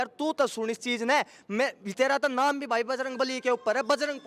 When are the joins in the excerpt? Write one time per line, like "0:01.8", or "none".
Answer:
none